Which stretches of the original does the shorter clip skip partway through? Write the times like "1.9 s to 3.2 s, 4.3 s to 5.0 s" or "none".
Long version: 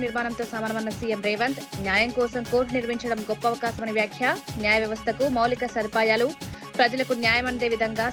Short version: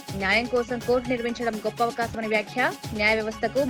none